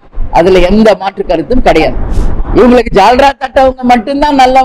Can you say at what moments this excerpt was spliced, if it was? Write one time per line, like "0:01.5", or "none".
0:02.1